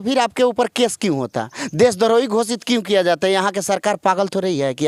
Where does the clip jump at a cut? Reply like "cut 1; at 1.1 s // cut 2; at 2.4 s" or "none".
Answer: none